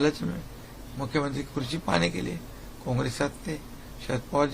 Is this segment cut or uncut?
uncut